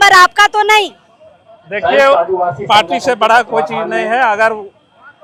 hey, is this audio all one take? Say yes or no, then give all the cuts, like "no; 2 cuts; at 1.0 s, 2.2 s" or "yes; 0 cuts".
yes; 0 cuts